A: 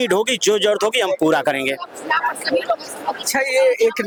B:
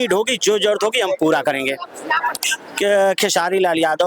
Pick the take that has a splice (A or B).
B